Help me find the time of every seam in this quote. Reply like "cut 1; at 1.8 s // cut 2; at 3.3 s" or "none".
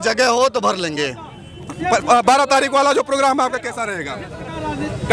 none